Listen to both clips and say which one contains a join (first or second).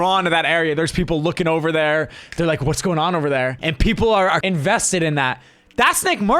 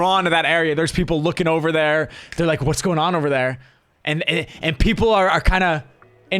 first